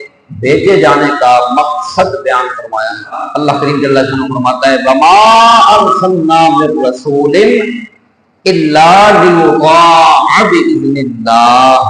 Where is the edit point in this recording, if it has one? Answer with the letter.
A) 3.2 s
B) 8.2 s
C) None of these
A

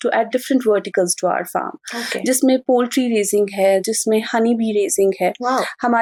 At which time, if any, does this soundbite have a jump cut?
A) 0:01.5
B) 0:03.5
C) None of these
C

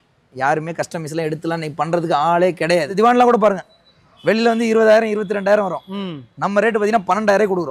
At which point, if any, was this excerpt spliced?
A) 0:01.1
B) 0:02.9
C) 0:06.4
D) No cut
B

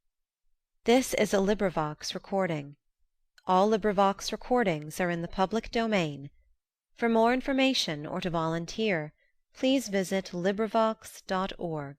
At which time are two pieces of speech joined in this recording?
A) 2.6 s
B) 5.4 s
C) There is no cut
C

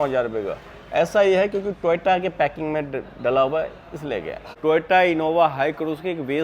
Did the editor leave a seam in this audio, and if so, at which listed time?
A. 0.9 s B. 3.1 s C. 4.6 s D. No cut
C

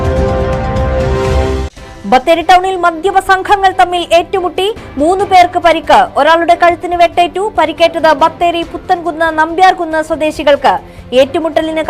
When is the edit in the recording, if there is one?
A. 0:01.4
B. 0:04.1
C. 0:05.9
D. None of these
D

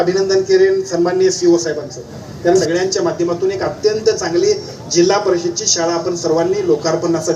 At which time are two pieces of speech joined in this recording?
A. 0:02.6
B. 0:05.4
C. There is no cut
A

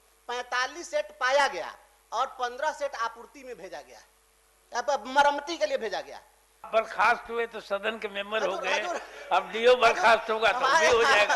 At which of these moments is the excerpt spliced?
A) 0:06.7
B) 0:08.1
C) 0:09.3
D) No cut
A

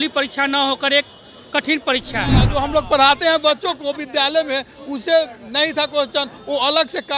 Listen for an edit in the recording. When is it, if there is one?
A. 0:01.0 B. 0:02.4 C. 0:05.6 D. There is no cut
B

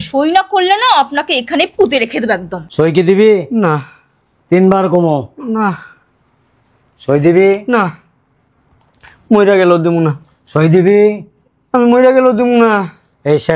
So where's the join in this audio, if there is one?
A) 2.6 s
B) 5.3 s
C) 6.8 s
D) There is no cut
A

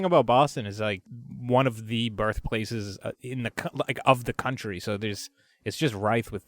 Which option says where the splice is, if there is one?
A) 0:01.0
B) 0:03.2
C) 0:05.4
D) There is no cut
A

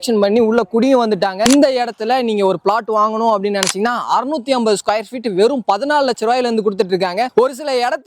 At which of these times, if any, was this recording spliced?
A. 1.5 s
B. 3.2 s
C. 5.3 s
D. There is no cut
A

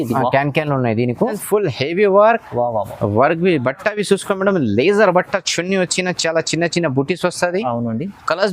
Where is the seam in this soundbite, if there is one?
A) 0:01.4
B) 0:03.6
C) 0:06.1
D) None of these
A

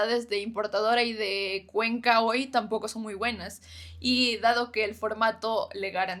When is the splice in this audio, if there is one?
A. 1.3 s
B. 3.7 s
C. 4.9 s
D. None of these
D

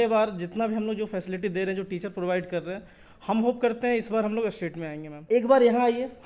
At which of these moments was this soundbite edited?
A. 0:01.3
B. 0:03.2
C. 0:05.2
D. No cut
C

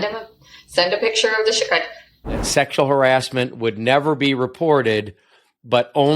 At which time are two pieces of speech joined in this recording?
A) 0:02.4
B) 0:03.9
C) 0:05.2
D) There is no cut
A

